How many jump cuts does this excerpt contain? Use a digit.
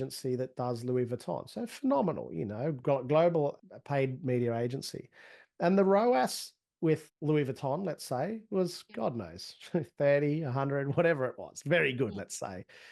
2